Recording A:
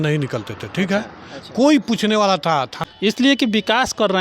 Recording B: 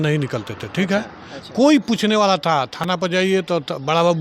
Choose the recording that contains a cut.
A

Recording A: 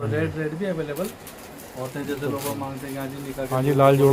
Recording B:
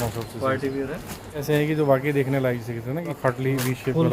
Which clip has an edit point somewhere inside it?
B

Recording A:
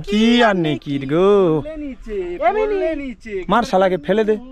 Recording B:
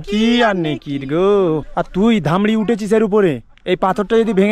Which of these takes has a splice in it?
B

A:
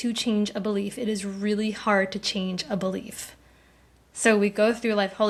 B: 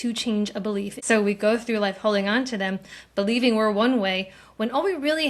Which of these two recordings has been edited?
B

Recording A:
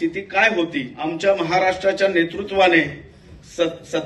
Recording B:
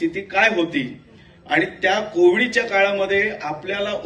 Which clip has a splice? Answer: A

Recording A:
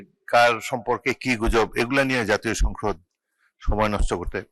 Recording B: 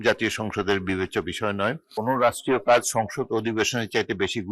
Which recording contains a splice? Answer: B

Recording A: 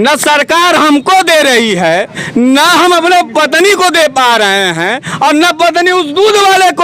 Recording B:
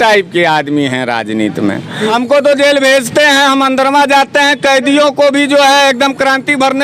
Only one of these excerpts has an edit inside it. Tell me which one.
B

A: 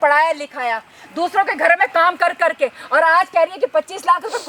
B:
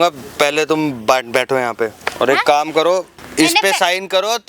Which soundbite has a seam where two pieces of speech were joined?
B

